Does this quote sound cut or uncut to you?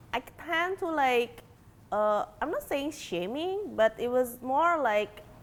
uncut